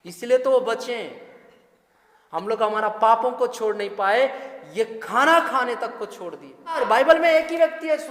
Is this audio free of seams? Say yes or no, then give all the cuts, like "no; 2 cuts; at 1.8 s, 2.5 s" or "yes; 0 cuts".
no; 1 cut; at 6.8 s